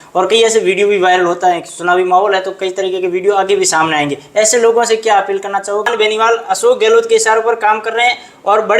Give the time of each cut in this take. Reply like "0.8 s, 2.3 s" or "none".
5.9 s